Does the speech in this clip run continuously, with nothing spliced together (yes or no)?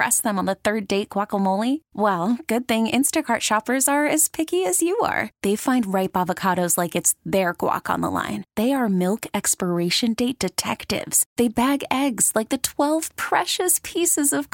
yes